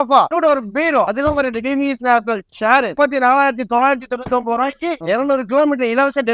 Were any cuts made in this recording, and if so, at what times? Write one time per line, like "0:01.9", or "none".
0:01.1
0:02.9
0:05.0